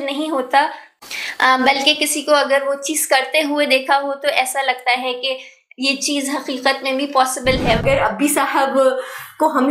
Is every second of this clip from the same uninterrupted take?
no; 1 cut; at 7.8 s

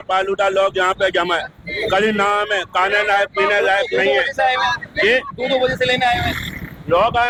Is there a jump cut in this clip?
no; 0 cuts

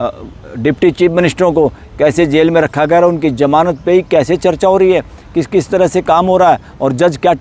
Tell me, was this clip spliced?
no; 0 cuts

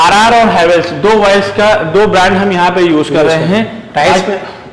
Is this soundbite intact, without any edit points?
yes; 0 cuts

